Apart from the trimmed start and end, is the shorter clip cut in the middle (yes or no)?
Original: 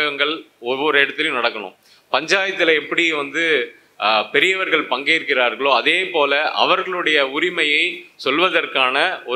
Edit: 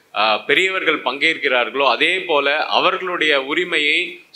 no